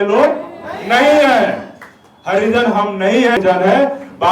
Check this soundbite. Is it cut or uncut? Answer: cut